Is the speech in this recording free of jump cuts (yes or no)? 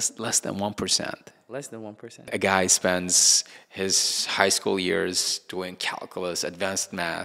no